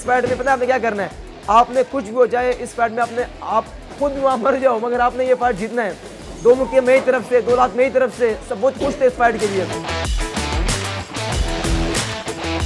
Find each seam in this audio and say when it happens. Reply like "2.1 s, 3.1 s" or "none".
none